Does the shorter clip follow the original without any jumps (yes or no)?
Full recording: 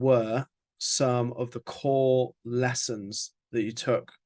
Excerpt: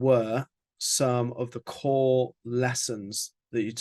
yes